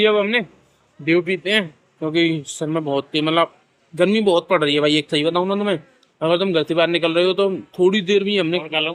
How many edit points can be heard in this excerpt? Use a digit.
0